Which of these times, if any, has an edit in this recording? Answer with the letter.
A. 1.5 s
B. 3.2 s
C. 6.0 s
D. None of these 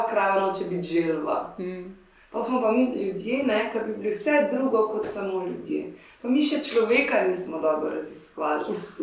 D